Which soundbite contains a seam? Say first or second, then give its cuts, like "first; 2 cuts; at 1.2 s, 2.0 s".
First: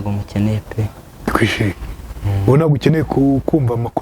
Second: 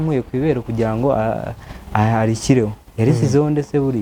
first; 1 cut; at 1.1 s